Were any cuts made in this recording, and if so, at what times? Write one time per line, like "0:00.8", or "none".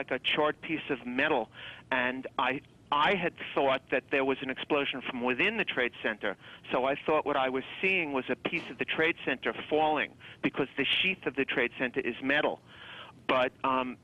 none